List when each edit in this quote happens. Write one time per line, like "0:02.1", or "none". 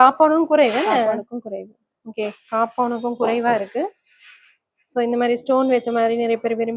none